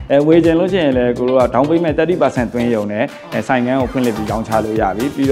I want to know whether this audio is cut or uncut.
uncut